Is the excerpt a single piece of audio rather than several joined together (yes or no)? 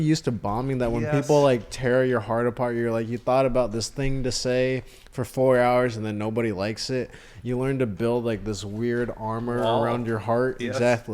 yes